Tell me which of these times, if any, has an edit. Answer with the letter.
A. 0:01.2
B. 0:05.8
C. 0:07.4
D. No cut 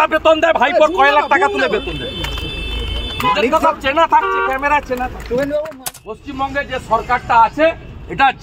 B